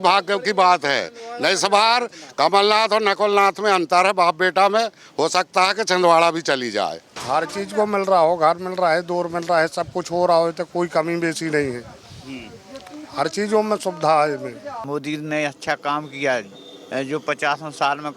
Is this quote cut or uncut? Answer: cut